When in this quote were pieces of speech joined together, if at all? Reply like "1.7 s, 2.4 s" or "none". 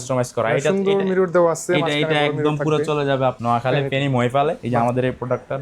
3.4 s, 4.6 s